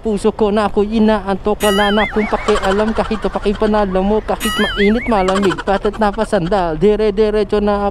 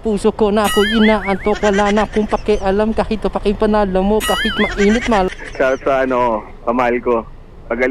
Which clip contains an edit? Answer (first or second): second